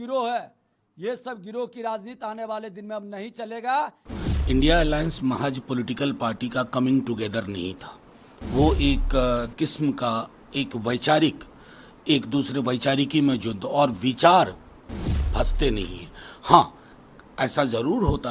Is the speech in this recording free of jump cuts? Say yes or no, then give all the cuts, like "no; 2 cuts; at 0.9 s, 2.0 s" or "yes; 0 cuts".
no; 1 cut; at 4.1 s